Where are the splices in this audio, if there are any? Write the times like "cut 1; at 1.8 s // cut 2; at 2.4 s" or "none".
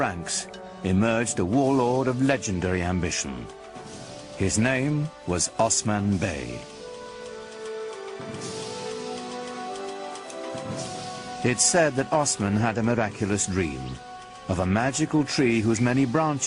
none